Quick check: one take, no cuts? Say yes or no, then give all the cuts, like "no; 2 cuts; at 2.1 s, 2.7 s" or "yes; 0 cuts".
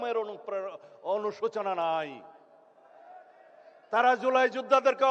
yes; 0 cuts